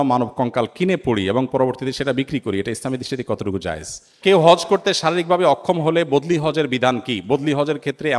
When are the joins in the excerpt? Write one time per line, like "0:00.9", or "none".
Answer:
0:04.2